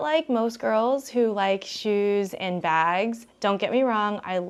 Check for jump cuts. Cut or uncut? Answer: uncut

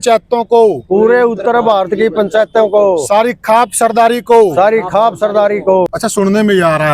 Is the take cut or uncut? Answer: cut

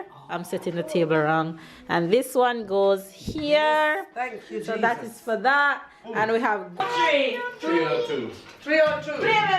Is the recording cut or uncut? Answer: cut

